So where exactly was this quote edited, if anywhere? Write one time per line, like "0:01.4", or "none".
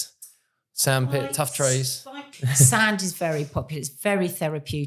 0:02.1